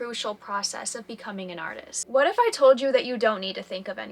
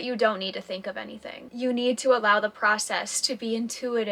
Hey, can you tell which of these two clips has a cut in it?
first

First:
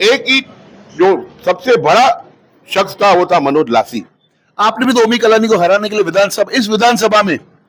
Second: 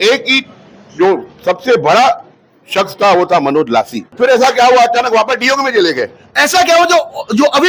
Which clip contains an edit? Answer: second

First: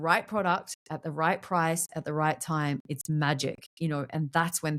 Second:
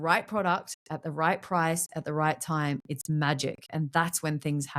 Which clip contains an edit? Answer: second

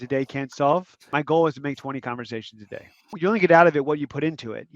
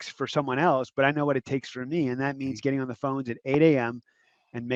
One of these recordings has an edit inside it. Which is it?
first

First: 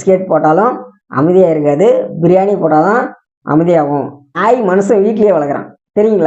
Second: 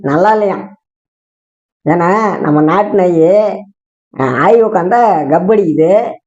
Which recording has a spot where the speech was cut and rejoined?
first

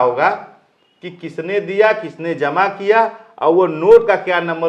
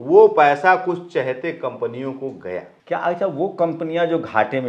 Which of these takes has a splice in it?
second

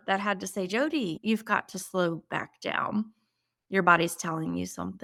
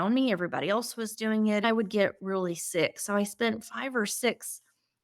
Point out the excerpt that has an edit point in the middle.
second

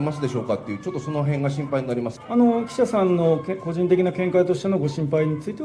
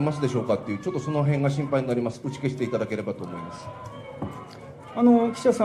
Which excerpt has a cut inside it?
first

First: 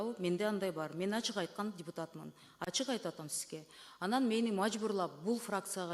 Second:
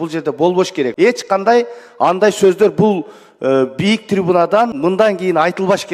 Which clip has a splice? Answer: second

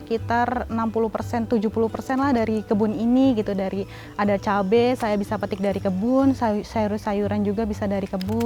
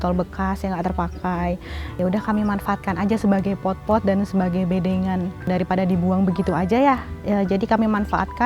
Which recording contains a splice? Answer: second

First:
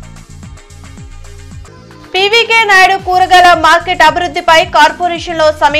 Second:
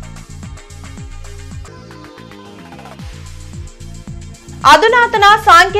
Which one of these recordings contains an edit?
first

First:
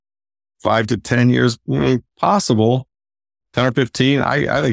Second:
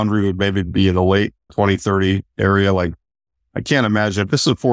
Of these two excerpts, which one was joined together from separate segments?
second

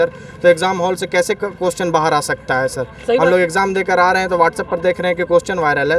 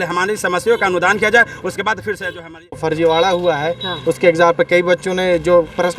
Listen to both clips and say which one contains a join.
second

